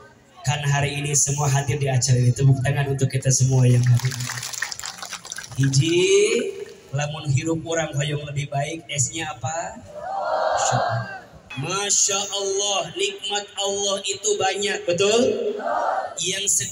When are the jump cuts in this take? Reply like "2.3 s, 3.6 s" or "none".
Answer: 11.5 s

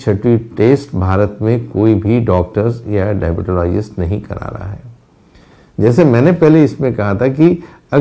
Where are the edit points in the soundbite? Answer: none

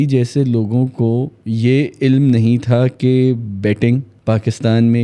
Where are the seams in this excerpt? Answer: 1.4 s, 4.1 s

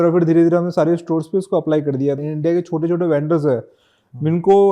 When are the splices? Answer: 2.2 s

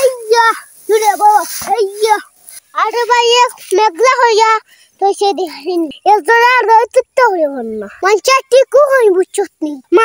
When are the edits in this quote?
2.7 s

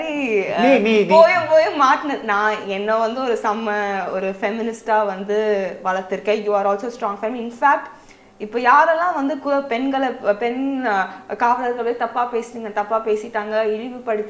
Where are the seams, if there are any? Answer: none

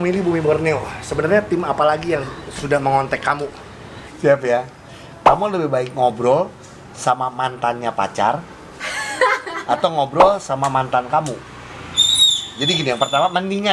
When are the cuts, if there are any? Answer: 4.0 s

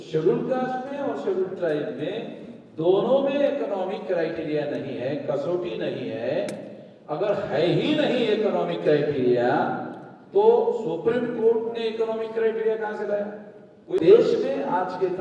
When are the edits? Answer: 14.0 s

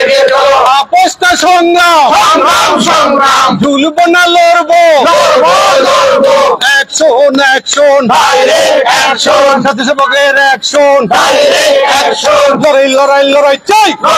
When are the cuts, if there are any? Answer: none

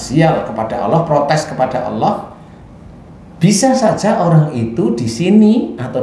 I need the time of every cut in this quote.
none

